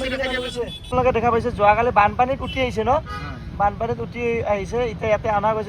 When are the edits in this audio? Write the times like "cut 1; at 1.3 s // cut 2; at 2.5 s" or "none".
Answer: cut 1; at 0.9 s